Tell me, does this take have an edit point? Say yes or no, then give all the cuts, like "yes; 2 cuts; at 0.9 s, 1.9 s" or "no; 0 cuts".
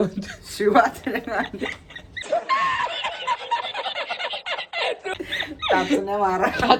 no; 0 cuts